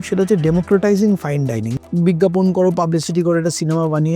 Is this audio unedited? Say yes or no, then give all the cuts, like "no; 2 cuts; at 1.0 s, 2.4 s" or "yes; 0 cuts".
no; 1 cut; at 1.7 s